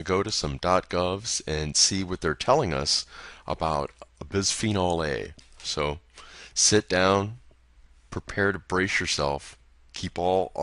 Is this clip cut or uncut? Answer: cut